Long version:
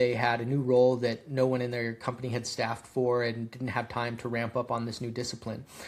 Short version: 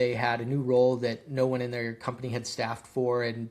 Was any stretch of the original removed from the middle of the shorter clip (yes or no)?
no